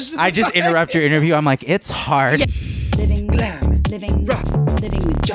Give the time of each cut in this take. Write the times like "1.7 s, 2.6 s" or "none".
2.5 s